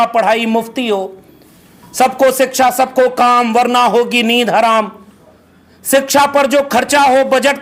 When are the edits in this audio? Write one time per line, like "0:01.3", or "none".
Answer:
none